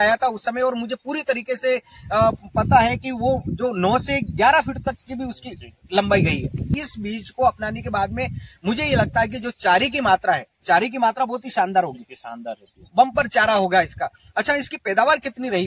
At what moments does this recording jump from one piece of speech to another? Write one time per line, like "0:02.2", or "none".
0:06.8